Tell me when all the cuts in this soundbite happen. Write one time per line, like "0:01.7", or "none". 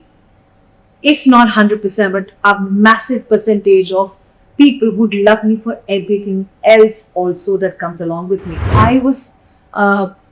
0:08.7